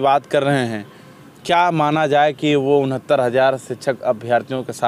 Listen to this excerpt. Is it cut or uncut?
uncut